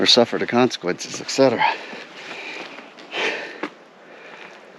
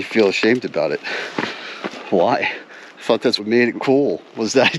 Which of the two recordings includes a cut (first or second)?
second